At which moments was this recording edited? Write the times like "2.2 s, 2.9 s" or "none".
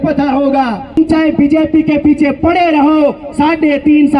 1.0 s